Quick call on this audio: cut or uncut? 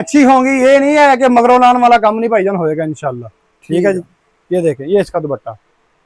uncut